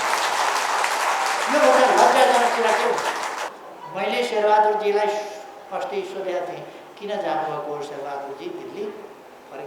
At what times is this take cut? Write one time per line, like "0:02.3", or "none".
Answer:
0:03.6